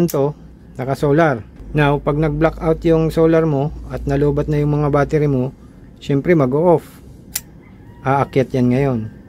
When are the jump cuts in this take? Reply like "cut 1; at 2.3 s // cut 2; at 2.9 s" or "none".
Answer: cut 1; at 1.6 s